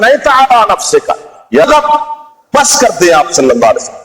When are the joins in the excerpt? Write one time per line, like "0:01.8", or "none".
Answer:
0:01.6